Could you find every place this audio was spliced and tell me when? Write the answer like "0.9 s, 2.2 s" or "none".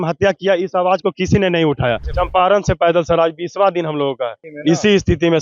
2.1 s, 4.4 s